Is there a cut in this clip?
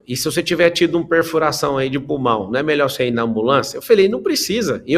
no; 0 cuts

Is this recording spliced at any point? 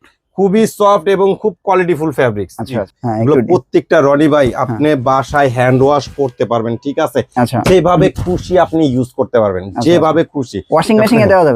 yes; 1 cut; at 2.9 s

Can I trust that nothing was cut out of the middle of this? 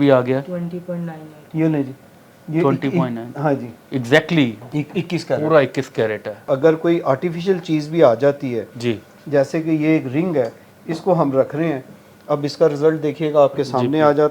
no; 1 cut; at 6.4 s

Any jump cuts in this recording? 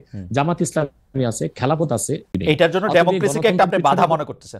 yes; 1 cut; at 2.3 s

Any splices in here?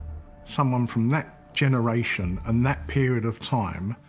no; 0 cuts

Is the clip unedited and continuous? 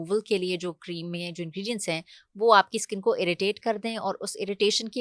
yes; 0 cuts

